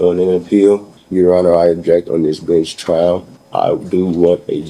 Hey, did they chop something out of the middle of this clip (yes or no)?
yes